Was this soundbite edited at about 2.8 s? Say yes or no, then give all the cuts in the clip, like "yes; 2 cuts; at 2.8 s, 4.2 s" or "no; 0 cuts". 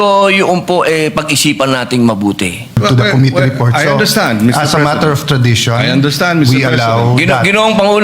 yes; 1 cut; at 2.8 s